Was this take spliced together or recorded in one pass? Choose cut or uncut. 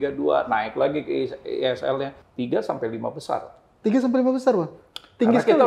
cut